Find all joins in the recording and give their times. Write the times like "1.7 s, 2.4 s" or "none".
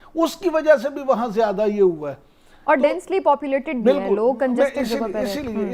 none